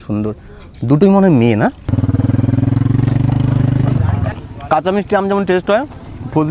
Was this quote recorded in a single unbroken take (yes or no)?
no